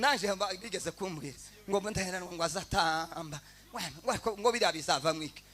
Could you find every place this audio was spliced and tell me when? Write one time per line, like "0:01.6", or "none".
none